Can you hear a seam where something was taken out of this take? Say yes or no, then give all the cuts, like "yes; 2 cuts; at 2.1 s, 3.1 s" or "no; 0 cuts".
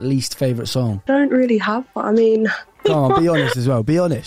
yes; 2 cuts; at 1.1 s, 2.7 s